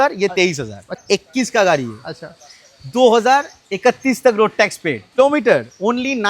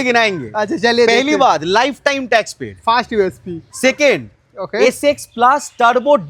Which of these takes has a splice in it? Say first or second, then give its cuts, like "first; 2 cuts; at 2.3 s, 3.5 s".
first; 2 cuts; at 1.0 s, 5.1 s